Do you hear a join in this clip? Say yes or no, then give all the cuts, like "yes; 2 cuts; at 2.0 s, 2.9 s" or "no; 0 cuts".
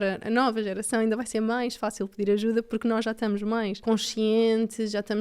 yes; 1 cut; at 3.8 s